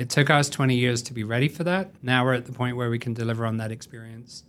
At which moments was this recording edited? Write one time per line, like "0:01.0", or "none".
0:02.0